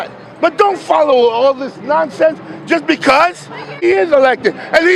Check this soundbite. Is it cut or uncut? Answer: cut